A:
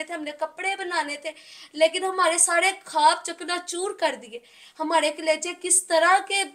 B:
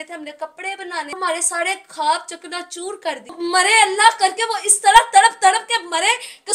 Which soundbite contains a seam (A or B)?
B